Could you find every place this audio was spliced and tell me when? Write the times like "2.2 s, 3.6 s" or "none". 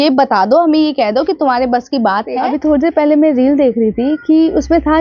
2.4 s